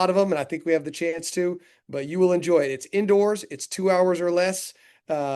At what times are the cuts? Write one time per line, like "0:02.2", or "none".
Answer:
none